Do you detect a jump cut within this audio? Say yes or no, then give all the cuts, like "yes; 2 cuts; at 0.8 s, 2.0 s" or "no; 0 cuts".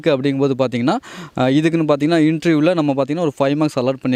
no; 0 cuts